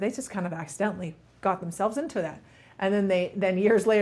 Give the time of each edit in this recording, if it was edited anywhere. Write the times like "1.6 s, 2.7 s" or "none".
none

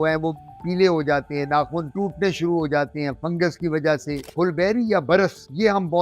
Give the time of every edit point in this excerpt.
4.2 s

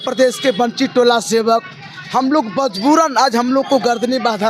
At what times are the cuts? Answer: none

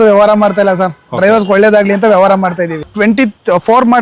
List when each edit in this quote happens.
2.9 s

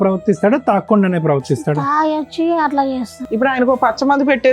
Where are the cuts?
3.2 s

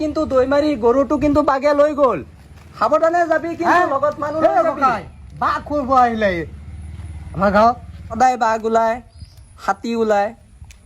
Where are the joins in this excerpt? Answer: 8.0 s

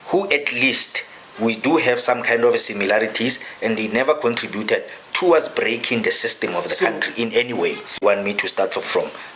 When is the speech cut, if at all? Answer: 8.0 s

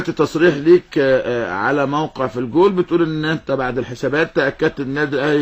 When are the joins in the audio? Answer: none

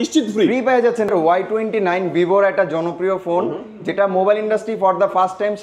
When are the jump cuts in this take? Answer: 1.1 s

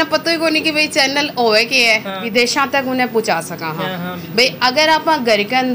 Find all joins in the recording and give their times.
2.1 s

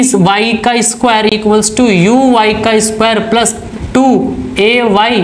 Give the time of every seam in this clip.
none

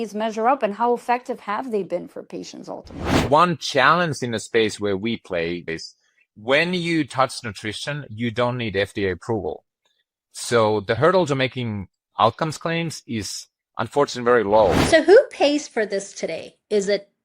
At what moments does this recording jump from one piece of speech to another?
3.3 s, 5.7 s, 11.0 s, 14.8 s

